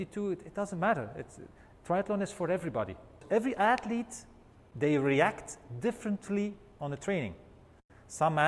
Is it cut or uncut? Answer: cut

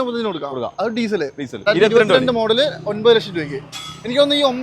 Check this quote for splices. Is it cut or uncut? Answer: cut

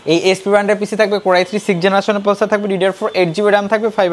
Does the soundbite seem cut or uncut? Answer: uncut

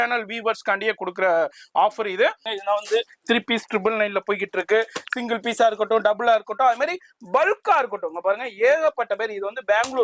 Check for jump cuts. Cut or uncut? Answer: cut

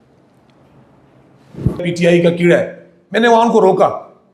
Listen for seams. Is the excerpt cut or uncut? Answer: cut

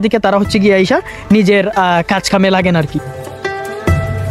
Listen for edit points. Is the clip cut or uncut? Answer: cut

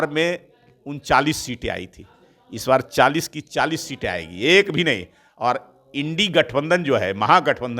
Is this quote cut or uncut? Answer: uncut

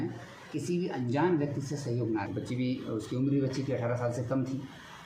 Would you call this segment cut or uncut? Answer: cut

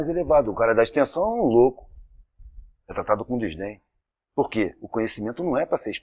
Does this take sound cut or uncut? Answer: uncut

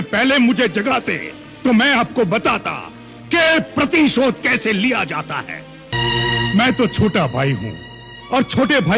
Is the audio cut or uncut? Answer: cut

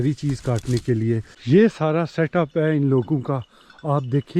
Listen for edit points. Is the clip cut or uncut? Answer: cut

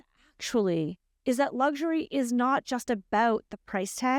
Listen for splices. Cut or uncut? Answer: uncut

